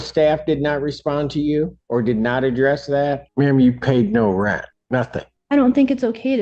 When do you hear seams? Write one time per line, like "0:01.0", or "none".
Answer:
0:01.8
0:03.2
0:05.0